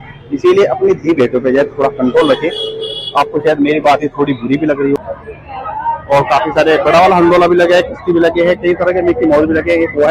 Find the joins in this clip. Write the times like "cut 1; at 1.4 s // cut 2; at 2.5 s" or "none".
cut 1; at 5.0 s